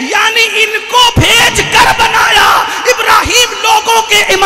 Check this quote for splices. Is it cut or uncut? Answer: cut